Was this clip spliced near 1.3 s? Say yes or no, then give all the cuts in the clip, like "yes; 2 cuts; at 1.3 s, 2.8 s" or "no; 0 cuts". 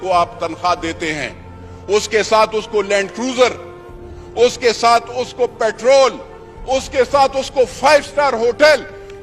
no; 0 cuts